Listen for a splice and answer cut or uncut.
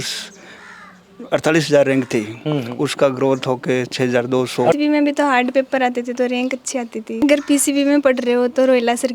cut